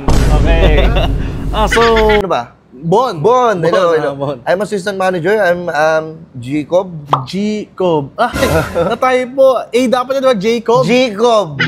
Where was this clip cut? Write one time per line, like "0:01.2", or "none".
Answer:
0:02.2